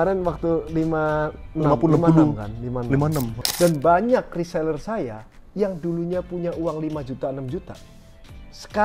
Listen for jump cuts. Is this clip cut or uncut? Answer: cut